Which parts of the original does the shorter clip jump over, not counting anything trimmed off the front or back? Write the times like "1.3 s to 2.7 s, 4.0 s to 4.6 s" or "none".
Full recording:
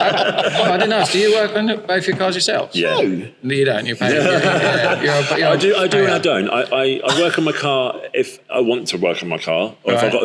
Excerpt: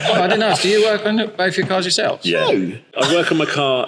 3.4 s to 7.0 s